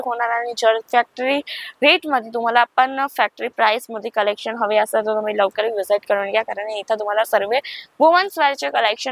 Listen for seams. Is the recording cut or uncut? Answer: uncut